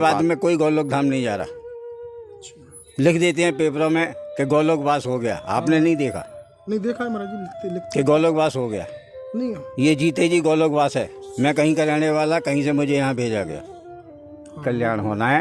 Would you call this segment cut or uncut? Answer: uncut